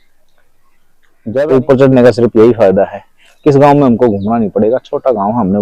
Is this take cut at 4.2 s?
no; 1 cut; at 1.3 s

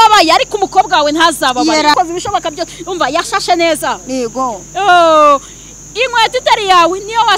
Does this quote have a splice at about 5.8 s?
no; 1 cut; at 1.9 s

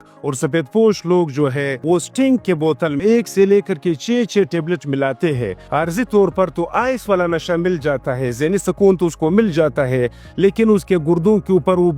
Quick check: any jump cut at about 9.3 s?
no; 3 cuts; at 1.7 s, 3.0 s, 5.6 s

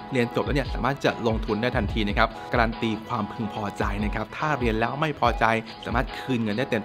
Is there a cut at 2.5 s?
yes; 2 cuts; at 2.5 s, 5.8 s

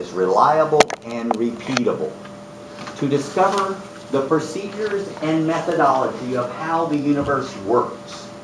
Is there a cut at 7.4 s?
no; 1 cut; at 5.6 s

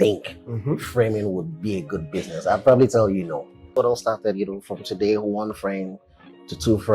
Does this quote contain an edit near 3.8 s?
yes; 1 cut; at 3.8 s

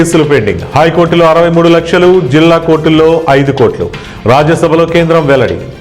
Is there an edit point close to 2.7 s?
no; 0 cuts

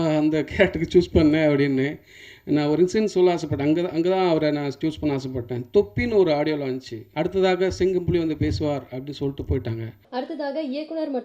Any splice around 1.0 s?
no; 2 cuts; at 7.0 s, 9.9 s

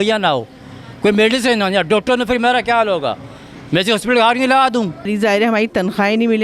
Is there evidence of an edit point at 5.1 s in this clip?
yes; 1 cut; at 5.1 s

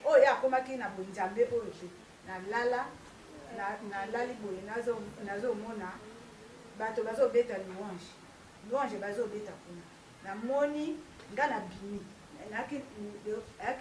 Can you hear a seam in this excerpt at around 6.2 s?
no; 0 cuts

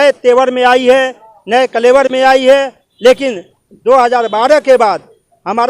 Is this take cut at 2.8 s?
yes; 1 cut; at 2.8 s

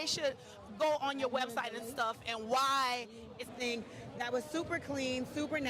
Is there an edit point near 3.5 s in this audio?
yes; 1 cut; at 3.5 s

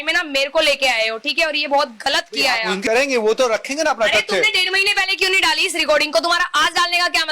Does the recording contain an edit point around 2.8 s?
yes; 1 cut; at 2.8 s

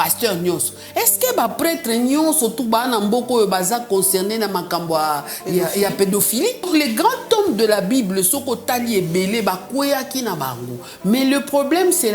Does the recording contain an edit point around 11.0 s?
no; 1 cut; at 6.7 s

